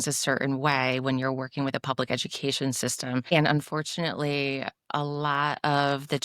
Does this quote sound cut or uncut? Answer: cut